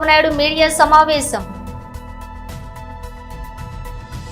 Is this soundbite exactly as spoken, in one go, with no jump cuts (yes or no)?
no